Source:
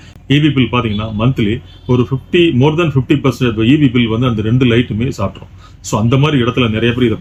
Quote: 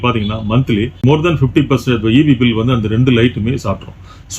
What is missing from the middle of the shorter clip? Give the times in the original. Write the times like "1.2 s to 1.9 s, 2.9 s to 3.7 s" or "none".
1.7 s to 2.5 s